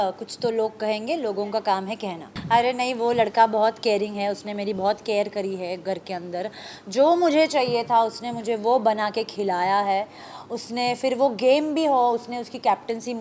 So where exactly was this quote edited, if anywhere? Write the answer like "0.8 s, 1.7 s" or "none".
none